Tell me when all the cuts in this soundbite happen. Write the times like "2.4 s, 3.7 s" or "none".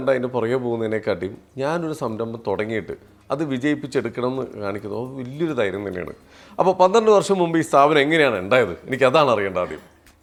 none